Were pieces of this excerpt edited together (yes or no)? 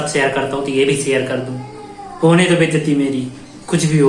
no